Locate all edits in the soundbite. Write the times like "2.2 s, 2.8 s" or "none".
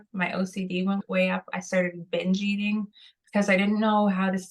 1.0 s